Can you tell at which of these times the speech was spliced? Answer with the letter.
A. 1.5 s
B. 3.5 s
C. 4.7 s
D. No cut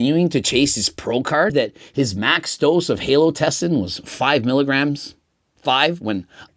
A